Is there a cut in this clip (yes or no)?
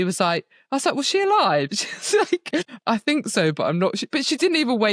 yes